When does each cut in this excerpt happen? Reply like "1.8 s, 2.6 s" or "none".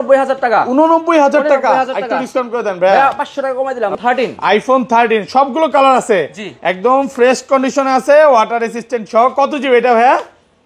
4.0 s